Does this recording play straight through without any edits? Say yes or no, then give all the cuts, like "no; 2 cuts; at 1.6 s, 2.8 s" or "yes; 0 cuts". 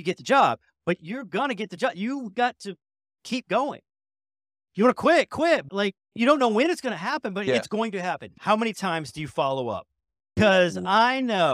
no; 2 cuts; at 8.3 s, 10.3 s